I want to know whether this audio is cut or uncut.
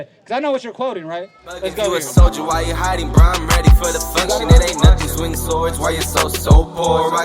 cut